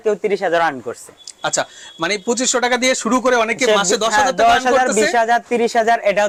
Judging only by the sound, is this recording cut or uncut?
uncut